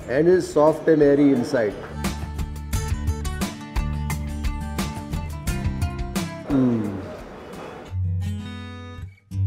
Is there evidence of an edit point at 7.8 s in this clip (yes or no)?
yes